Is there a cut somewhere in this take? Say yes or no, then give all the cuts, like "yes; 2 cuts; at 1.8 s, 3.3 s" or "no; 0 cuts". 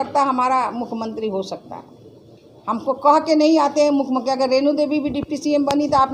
no; 0 cuts